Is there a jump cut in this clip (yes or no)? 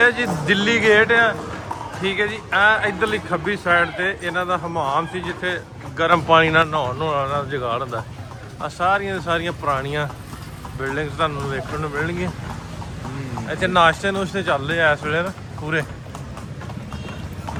no